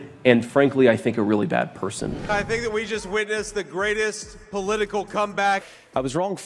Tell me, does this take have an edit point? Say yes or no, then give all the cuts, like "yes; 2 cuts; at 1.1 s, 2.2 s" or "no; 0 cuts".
yes; 2 cuts; at 2.2 s, 5.6 s